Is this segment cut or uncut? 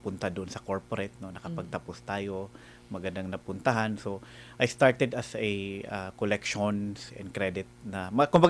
uncut